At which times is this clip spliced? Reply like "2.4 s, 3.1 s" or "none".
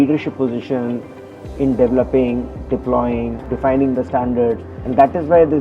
3.4 s